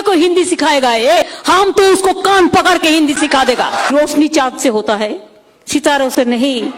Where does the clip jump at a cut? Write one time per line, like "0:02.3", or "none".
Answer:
0:01.2
0:03.9